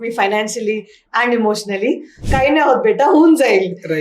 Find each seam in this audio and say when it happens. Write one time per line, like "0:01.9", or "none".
0:02.2